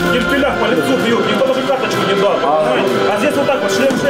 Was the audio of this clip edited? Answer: no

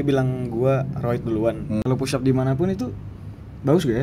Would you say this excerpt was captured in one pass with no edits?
no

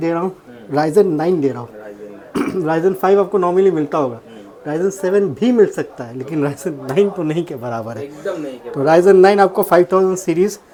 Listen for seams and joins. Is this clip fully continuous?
yes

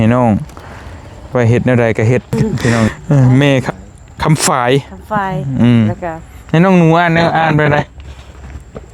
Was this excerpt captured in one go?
no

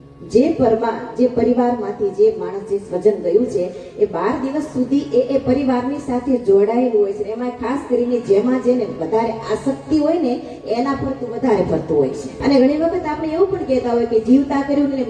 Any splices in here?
yes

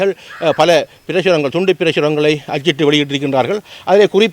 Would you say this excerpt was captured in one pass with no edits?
yes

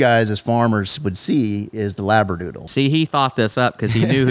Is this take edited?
yes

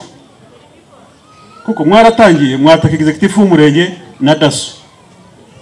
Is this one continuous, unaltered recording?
yes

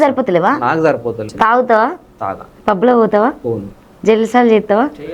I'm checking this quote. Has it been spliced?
yes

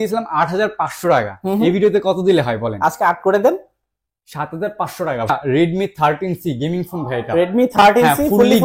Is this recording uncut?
no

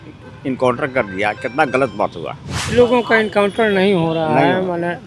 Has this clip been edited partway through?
yes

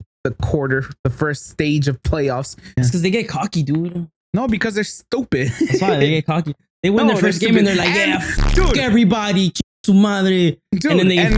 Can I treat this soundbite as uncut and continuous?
no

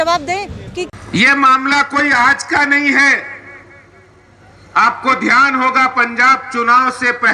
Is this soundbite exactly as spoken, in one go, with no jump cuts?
no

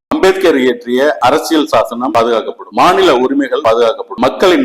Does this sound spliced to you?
yes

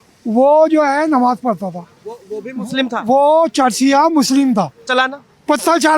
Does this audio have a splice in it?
no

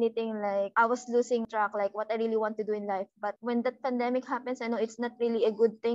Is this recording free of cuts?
no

